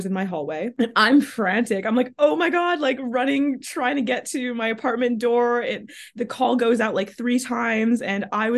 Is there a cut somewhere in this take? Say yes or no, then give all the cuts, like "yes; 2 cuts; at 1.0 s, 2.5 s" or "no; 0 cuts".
no; 0 cuts